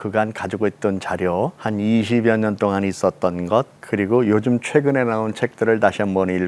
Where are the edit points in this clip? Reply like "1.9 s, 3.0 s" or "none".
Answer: 1.6 s, 3.8 s